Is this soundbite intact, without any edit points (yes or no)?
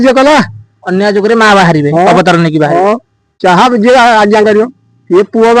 no